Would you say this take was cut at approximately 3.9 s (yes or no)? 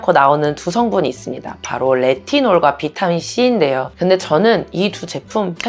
yes